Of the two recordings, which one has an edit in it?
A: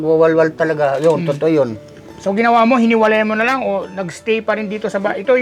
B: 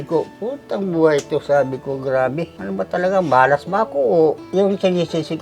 B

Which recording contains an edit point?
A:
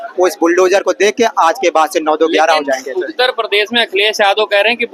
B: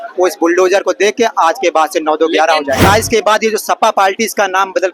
B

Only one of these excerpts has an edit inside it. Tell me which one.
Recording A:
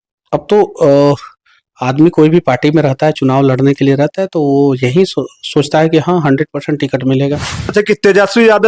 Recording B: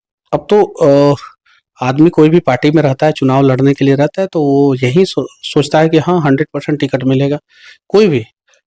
A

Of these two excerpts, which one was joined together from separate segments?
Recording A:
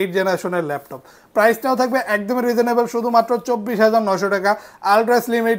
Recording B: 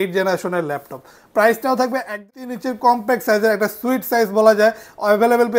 B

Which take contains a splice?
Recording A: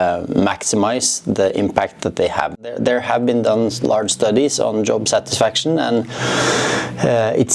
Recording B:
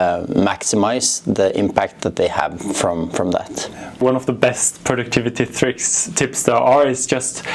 A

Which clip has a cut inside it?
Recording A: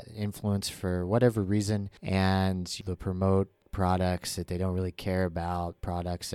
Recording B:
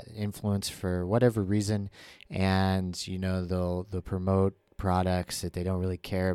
A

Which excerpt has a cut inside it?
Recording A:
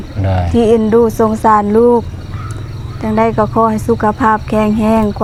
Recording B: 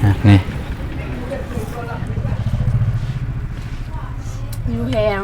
B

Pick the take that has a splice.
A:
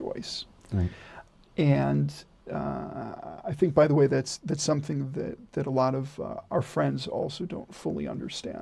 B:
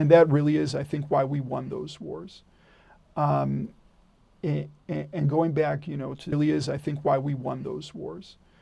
B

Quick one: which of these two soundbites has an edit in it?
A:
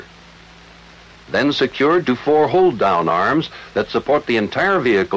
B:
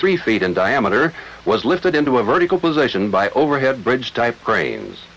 B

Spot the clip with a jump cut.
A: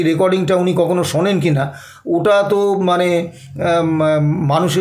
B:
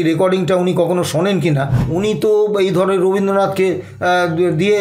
B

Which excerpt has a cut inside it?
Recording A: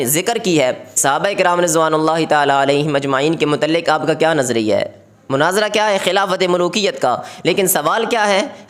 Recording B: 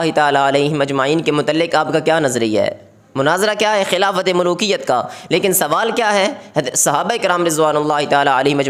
A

